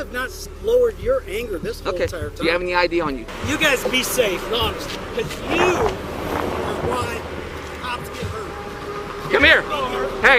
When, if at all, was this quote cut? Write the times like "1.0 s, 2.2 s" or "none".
3.3 s